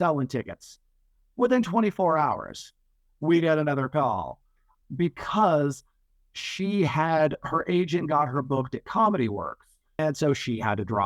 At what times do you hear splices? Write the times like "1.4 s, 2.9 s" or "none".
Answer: 10.0 s